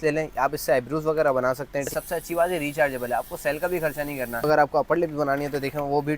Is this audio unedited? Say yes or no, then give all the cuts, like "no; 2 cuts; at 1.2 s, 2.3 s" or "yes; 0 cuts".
no; 2 cuts; at 1.9 s, 4.5 s